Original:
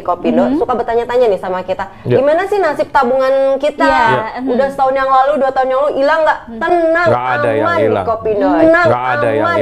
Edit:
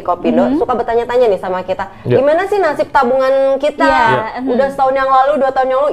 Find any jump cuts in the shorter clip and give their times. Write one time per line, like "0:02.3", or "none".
none